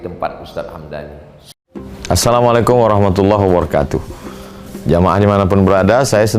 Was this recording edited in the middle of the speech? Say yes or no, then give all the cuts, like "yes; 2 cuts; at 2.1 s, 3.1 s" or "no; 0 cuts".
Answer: yes; 1 cut; at 1.5 s